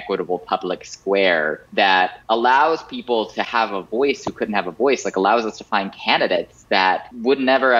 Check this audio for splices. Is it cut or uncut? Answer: cut